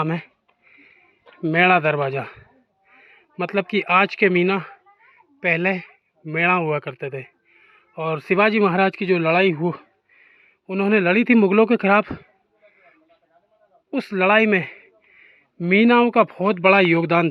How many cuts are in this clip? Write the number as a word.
zero